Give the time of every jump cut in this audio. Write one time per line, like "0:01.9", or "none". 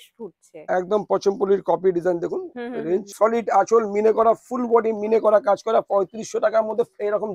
0:03.1